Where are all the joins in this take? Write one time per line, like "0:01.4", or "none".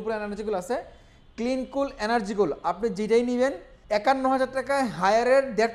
0:03.7